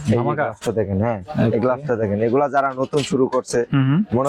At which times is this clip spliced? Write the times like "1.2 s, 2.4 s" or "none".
none

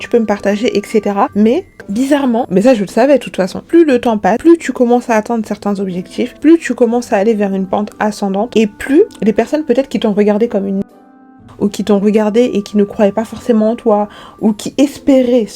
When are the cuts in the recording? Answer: 1.8 s

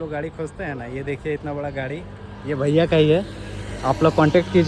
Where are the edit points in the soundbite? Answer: none

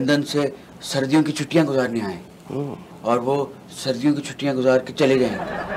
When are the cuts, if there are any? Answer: none

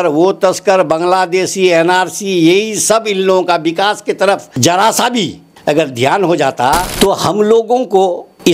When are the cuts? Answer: 4.5 s, 5.4 s, 6.9 s

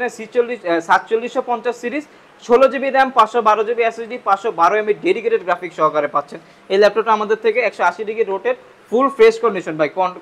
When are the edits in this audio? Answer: none

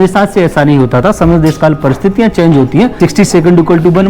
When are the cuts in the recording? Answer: 2.9 s

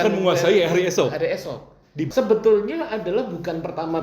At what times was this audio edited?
2.1 s

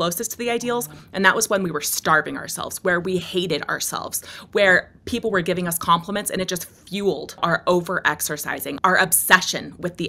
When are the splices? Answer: 7.4 s, 8.7 s

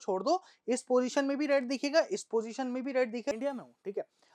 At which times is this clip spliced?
3.3 s

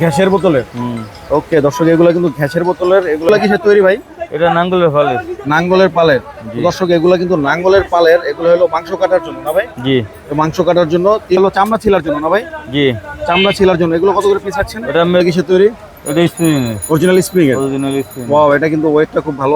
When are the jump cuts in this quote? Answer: 3.3 s, 11.4 s, 15.2 s

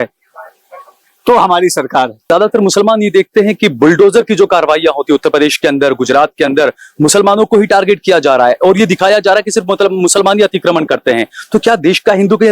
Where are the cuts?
2.3 s

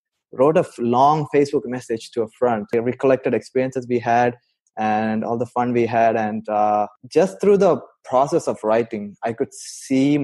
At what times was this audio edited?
2.7 s, 7.0 s

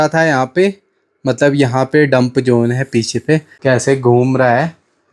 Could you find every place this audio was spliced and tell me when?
3.5 s

